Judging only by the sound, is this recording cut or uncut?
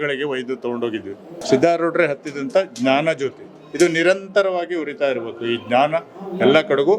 cut